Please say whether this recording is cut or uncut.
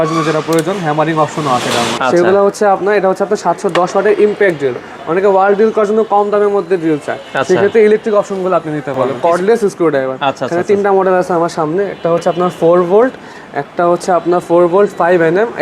cut